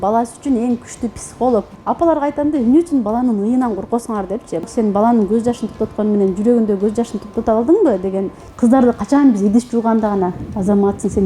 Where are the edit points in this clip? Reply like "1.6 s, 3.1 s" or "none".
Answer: 1.7 s, 4.7 s, 8.4 s